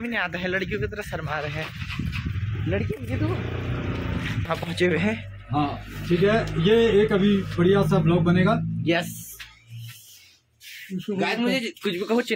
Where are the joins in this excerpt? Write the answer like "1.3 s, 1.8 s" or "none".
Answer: 4.5 s